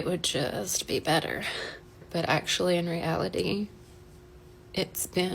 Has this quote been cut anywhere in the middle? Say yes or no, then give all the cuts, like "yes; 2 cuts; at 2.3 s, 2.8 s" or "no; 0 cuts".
yes; 1 cut; at 2.1 s